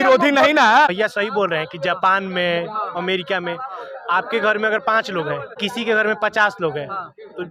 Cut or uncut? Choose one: uncut